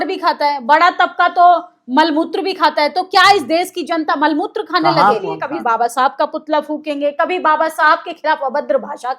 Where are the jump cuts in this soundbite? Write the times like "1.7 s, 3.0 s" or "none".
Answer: 5.4 s